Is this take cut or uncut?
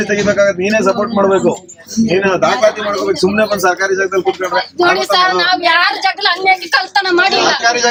uncut